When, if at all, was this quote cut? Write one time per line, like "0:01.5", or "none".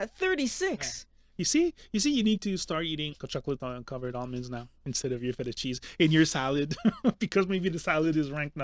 0:03.2